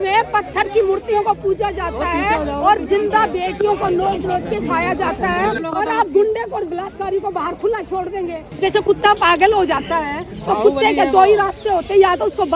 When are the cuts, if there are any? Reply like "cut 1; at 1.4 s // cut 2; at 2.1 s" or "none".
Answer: cut 1; at 5.6 s // cut 2; at 8.5 s